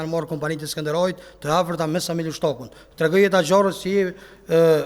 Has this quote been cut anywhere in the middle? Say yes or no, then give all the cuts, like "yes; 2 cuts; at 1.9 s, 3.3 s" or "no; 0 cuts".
no; 0 cuts